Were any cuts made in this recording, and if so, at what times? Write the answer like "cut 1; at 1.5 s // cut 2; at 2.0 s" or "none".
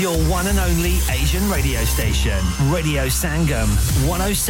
none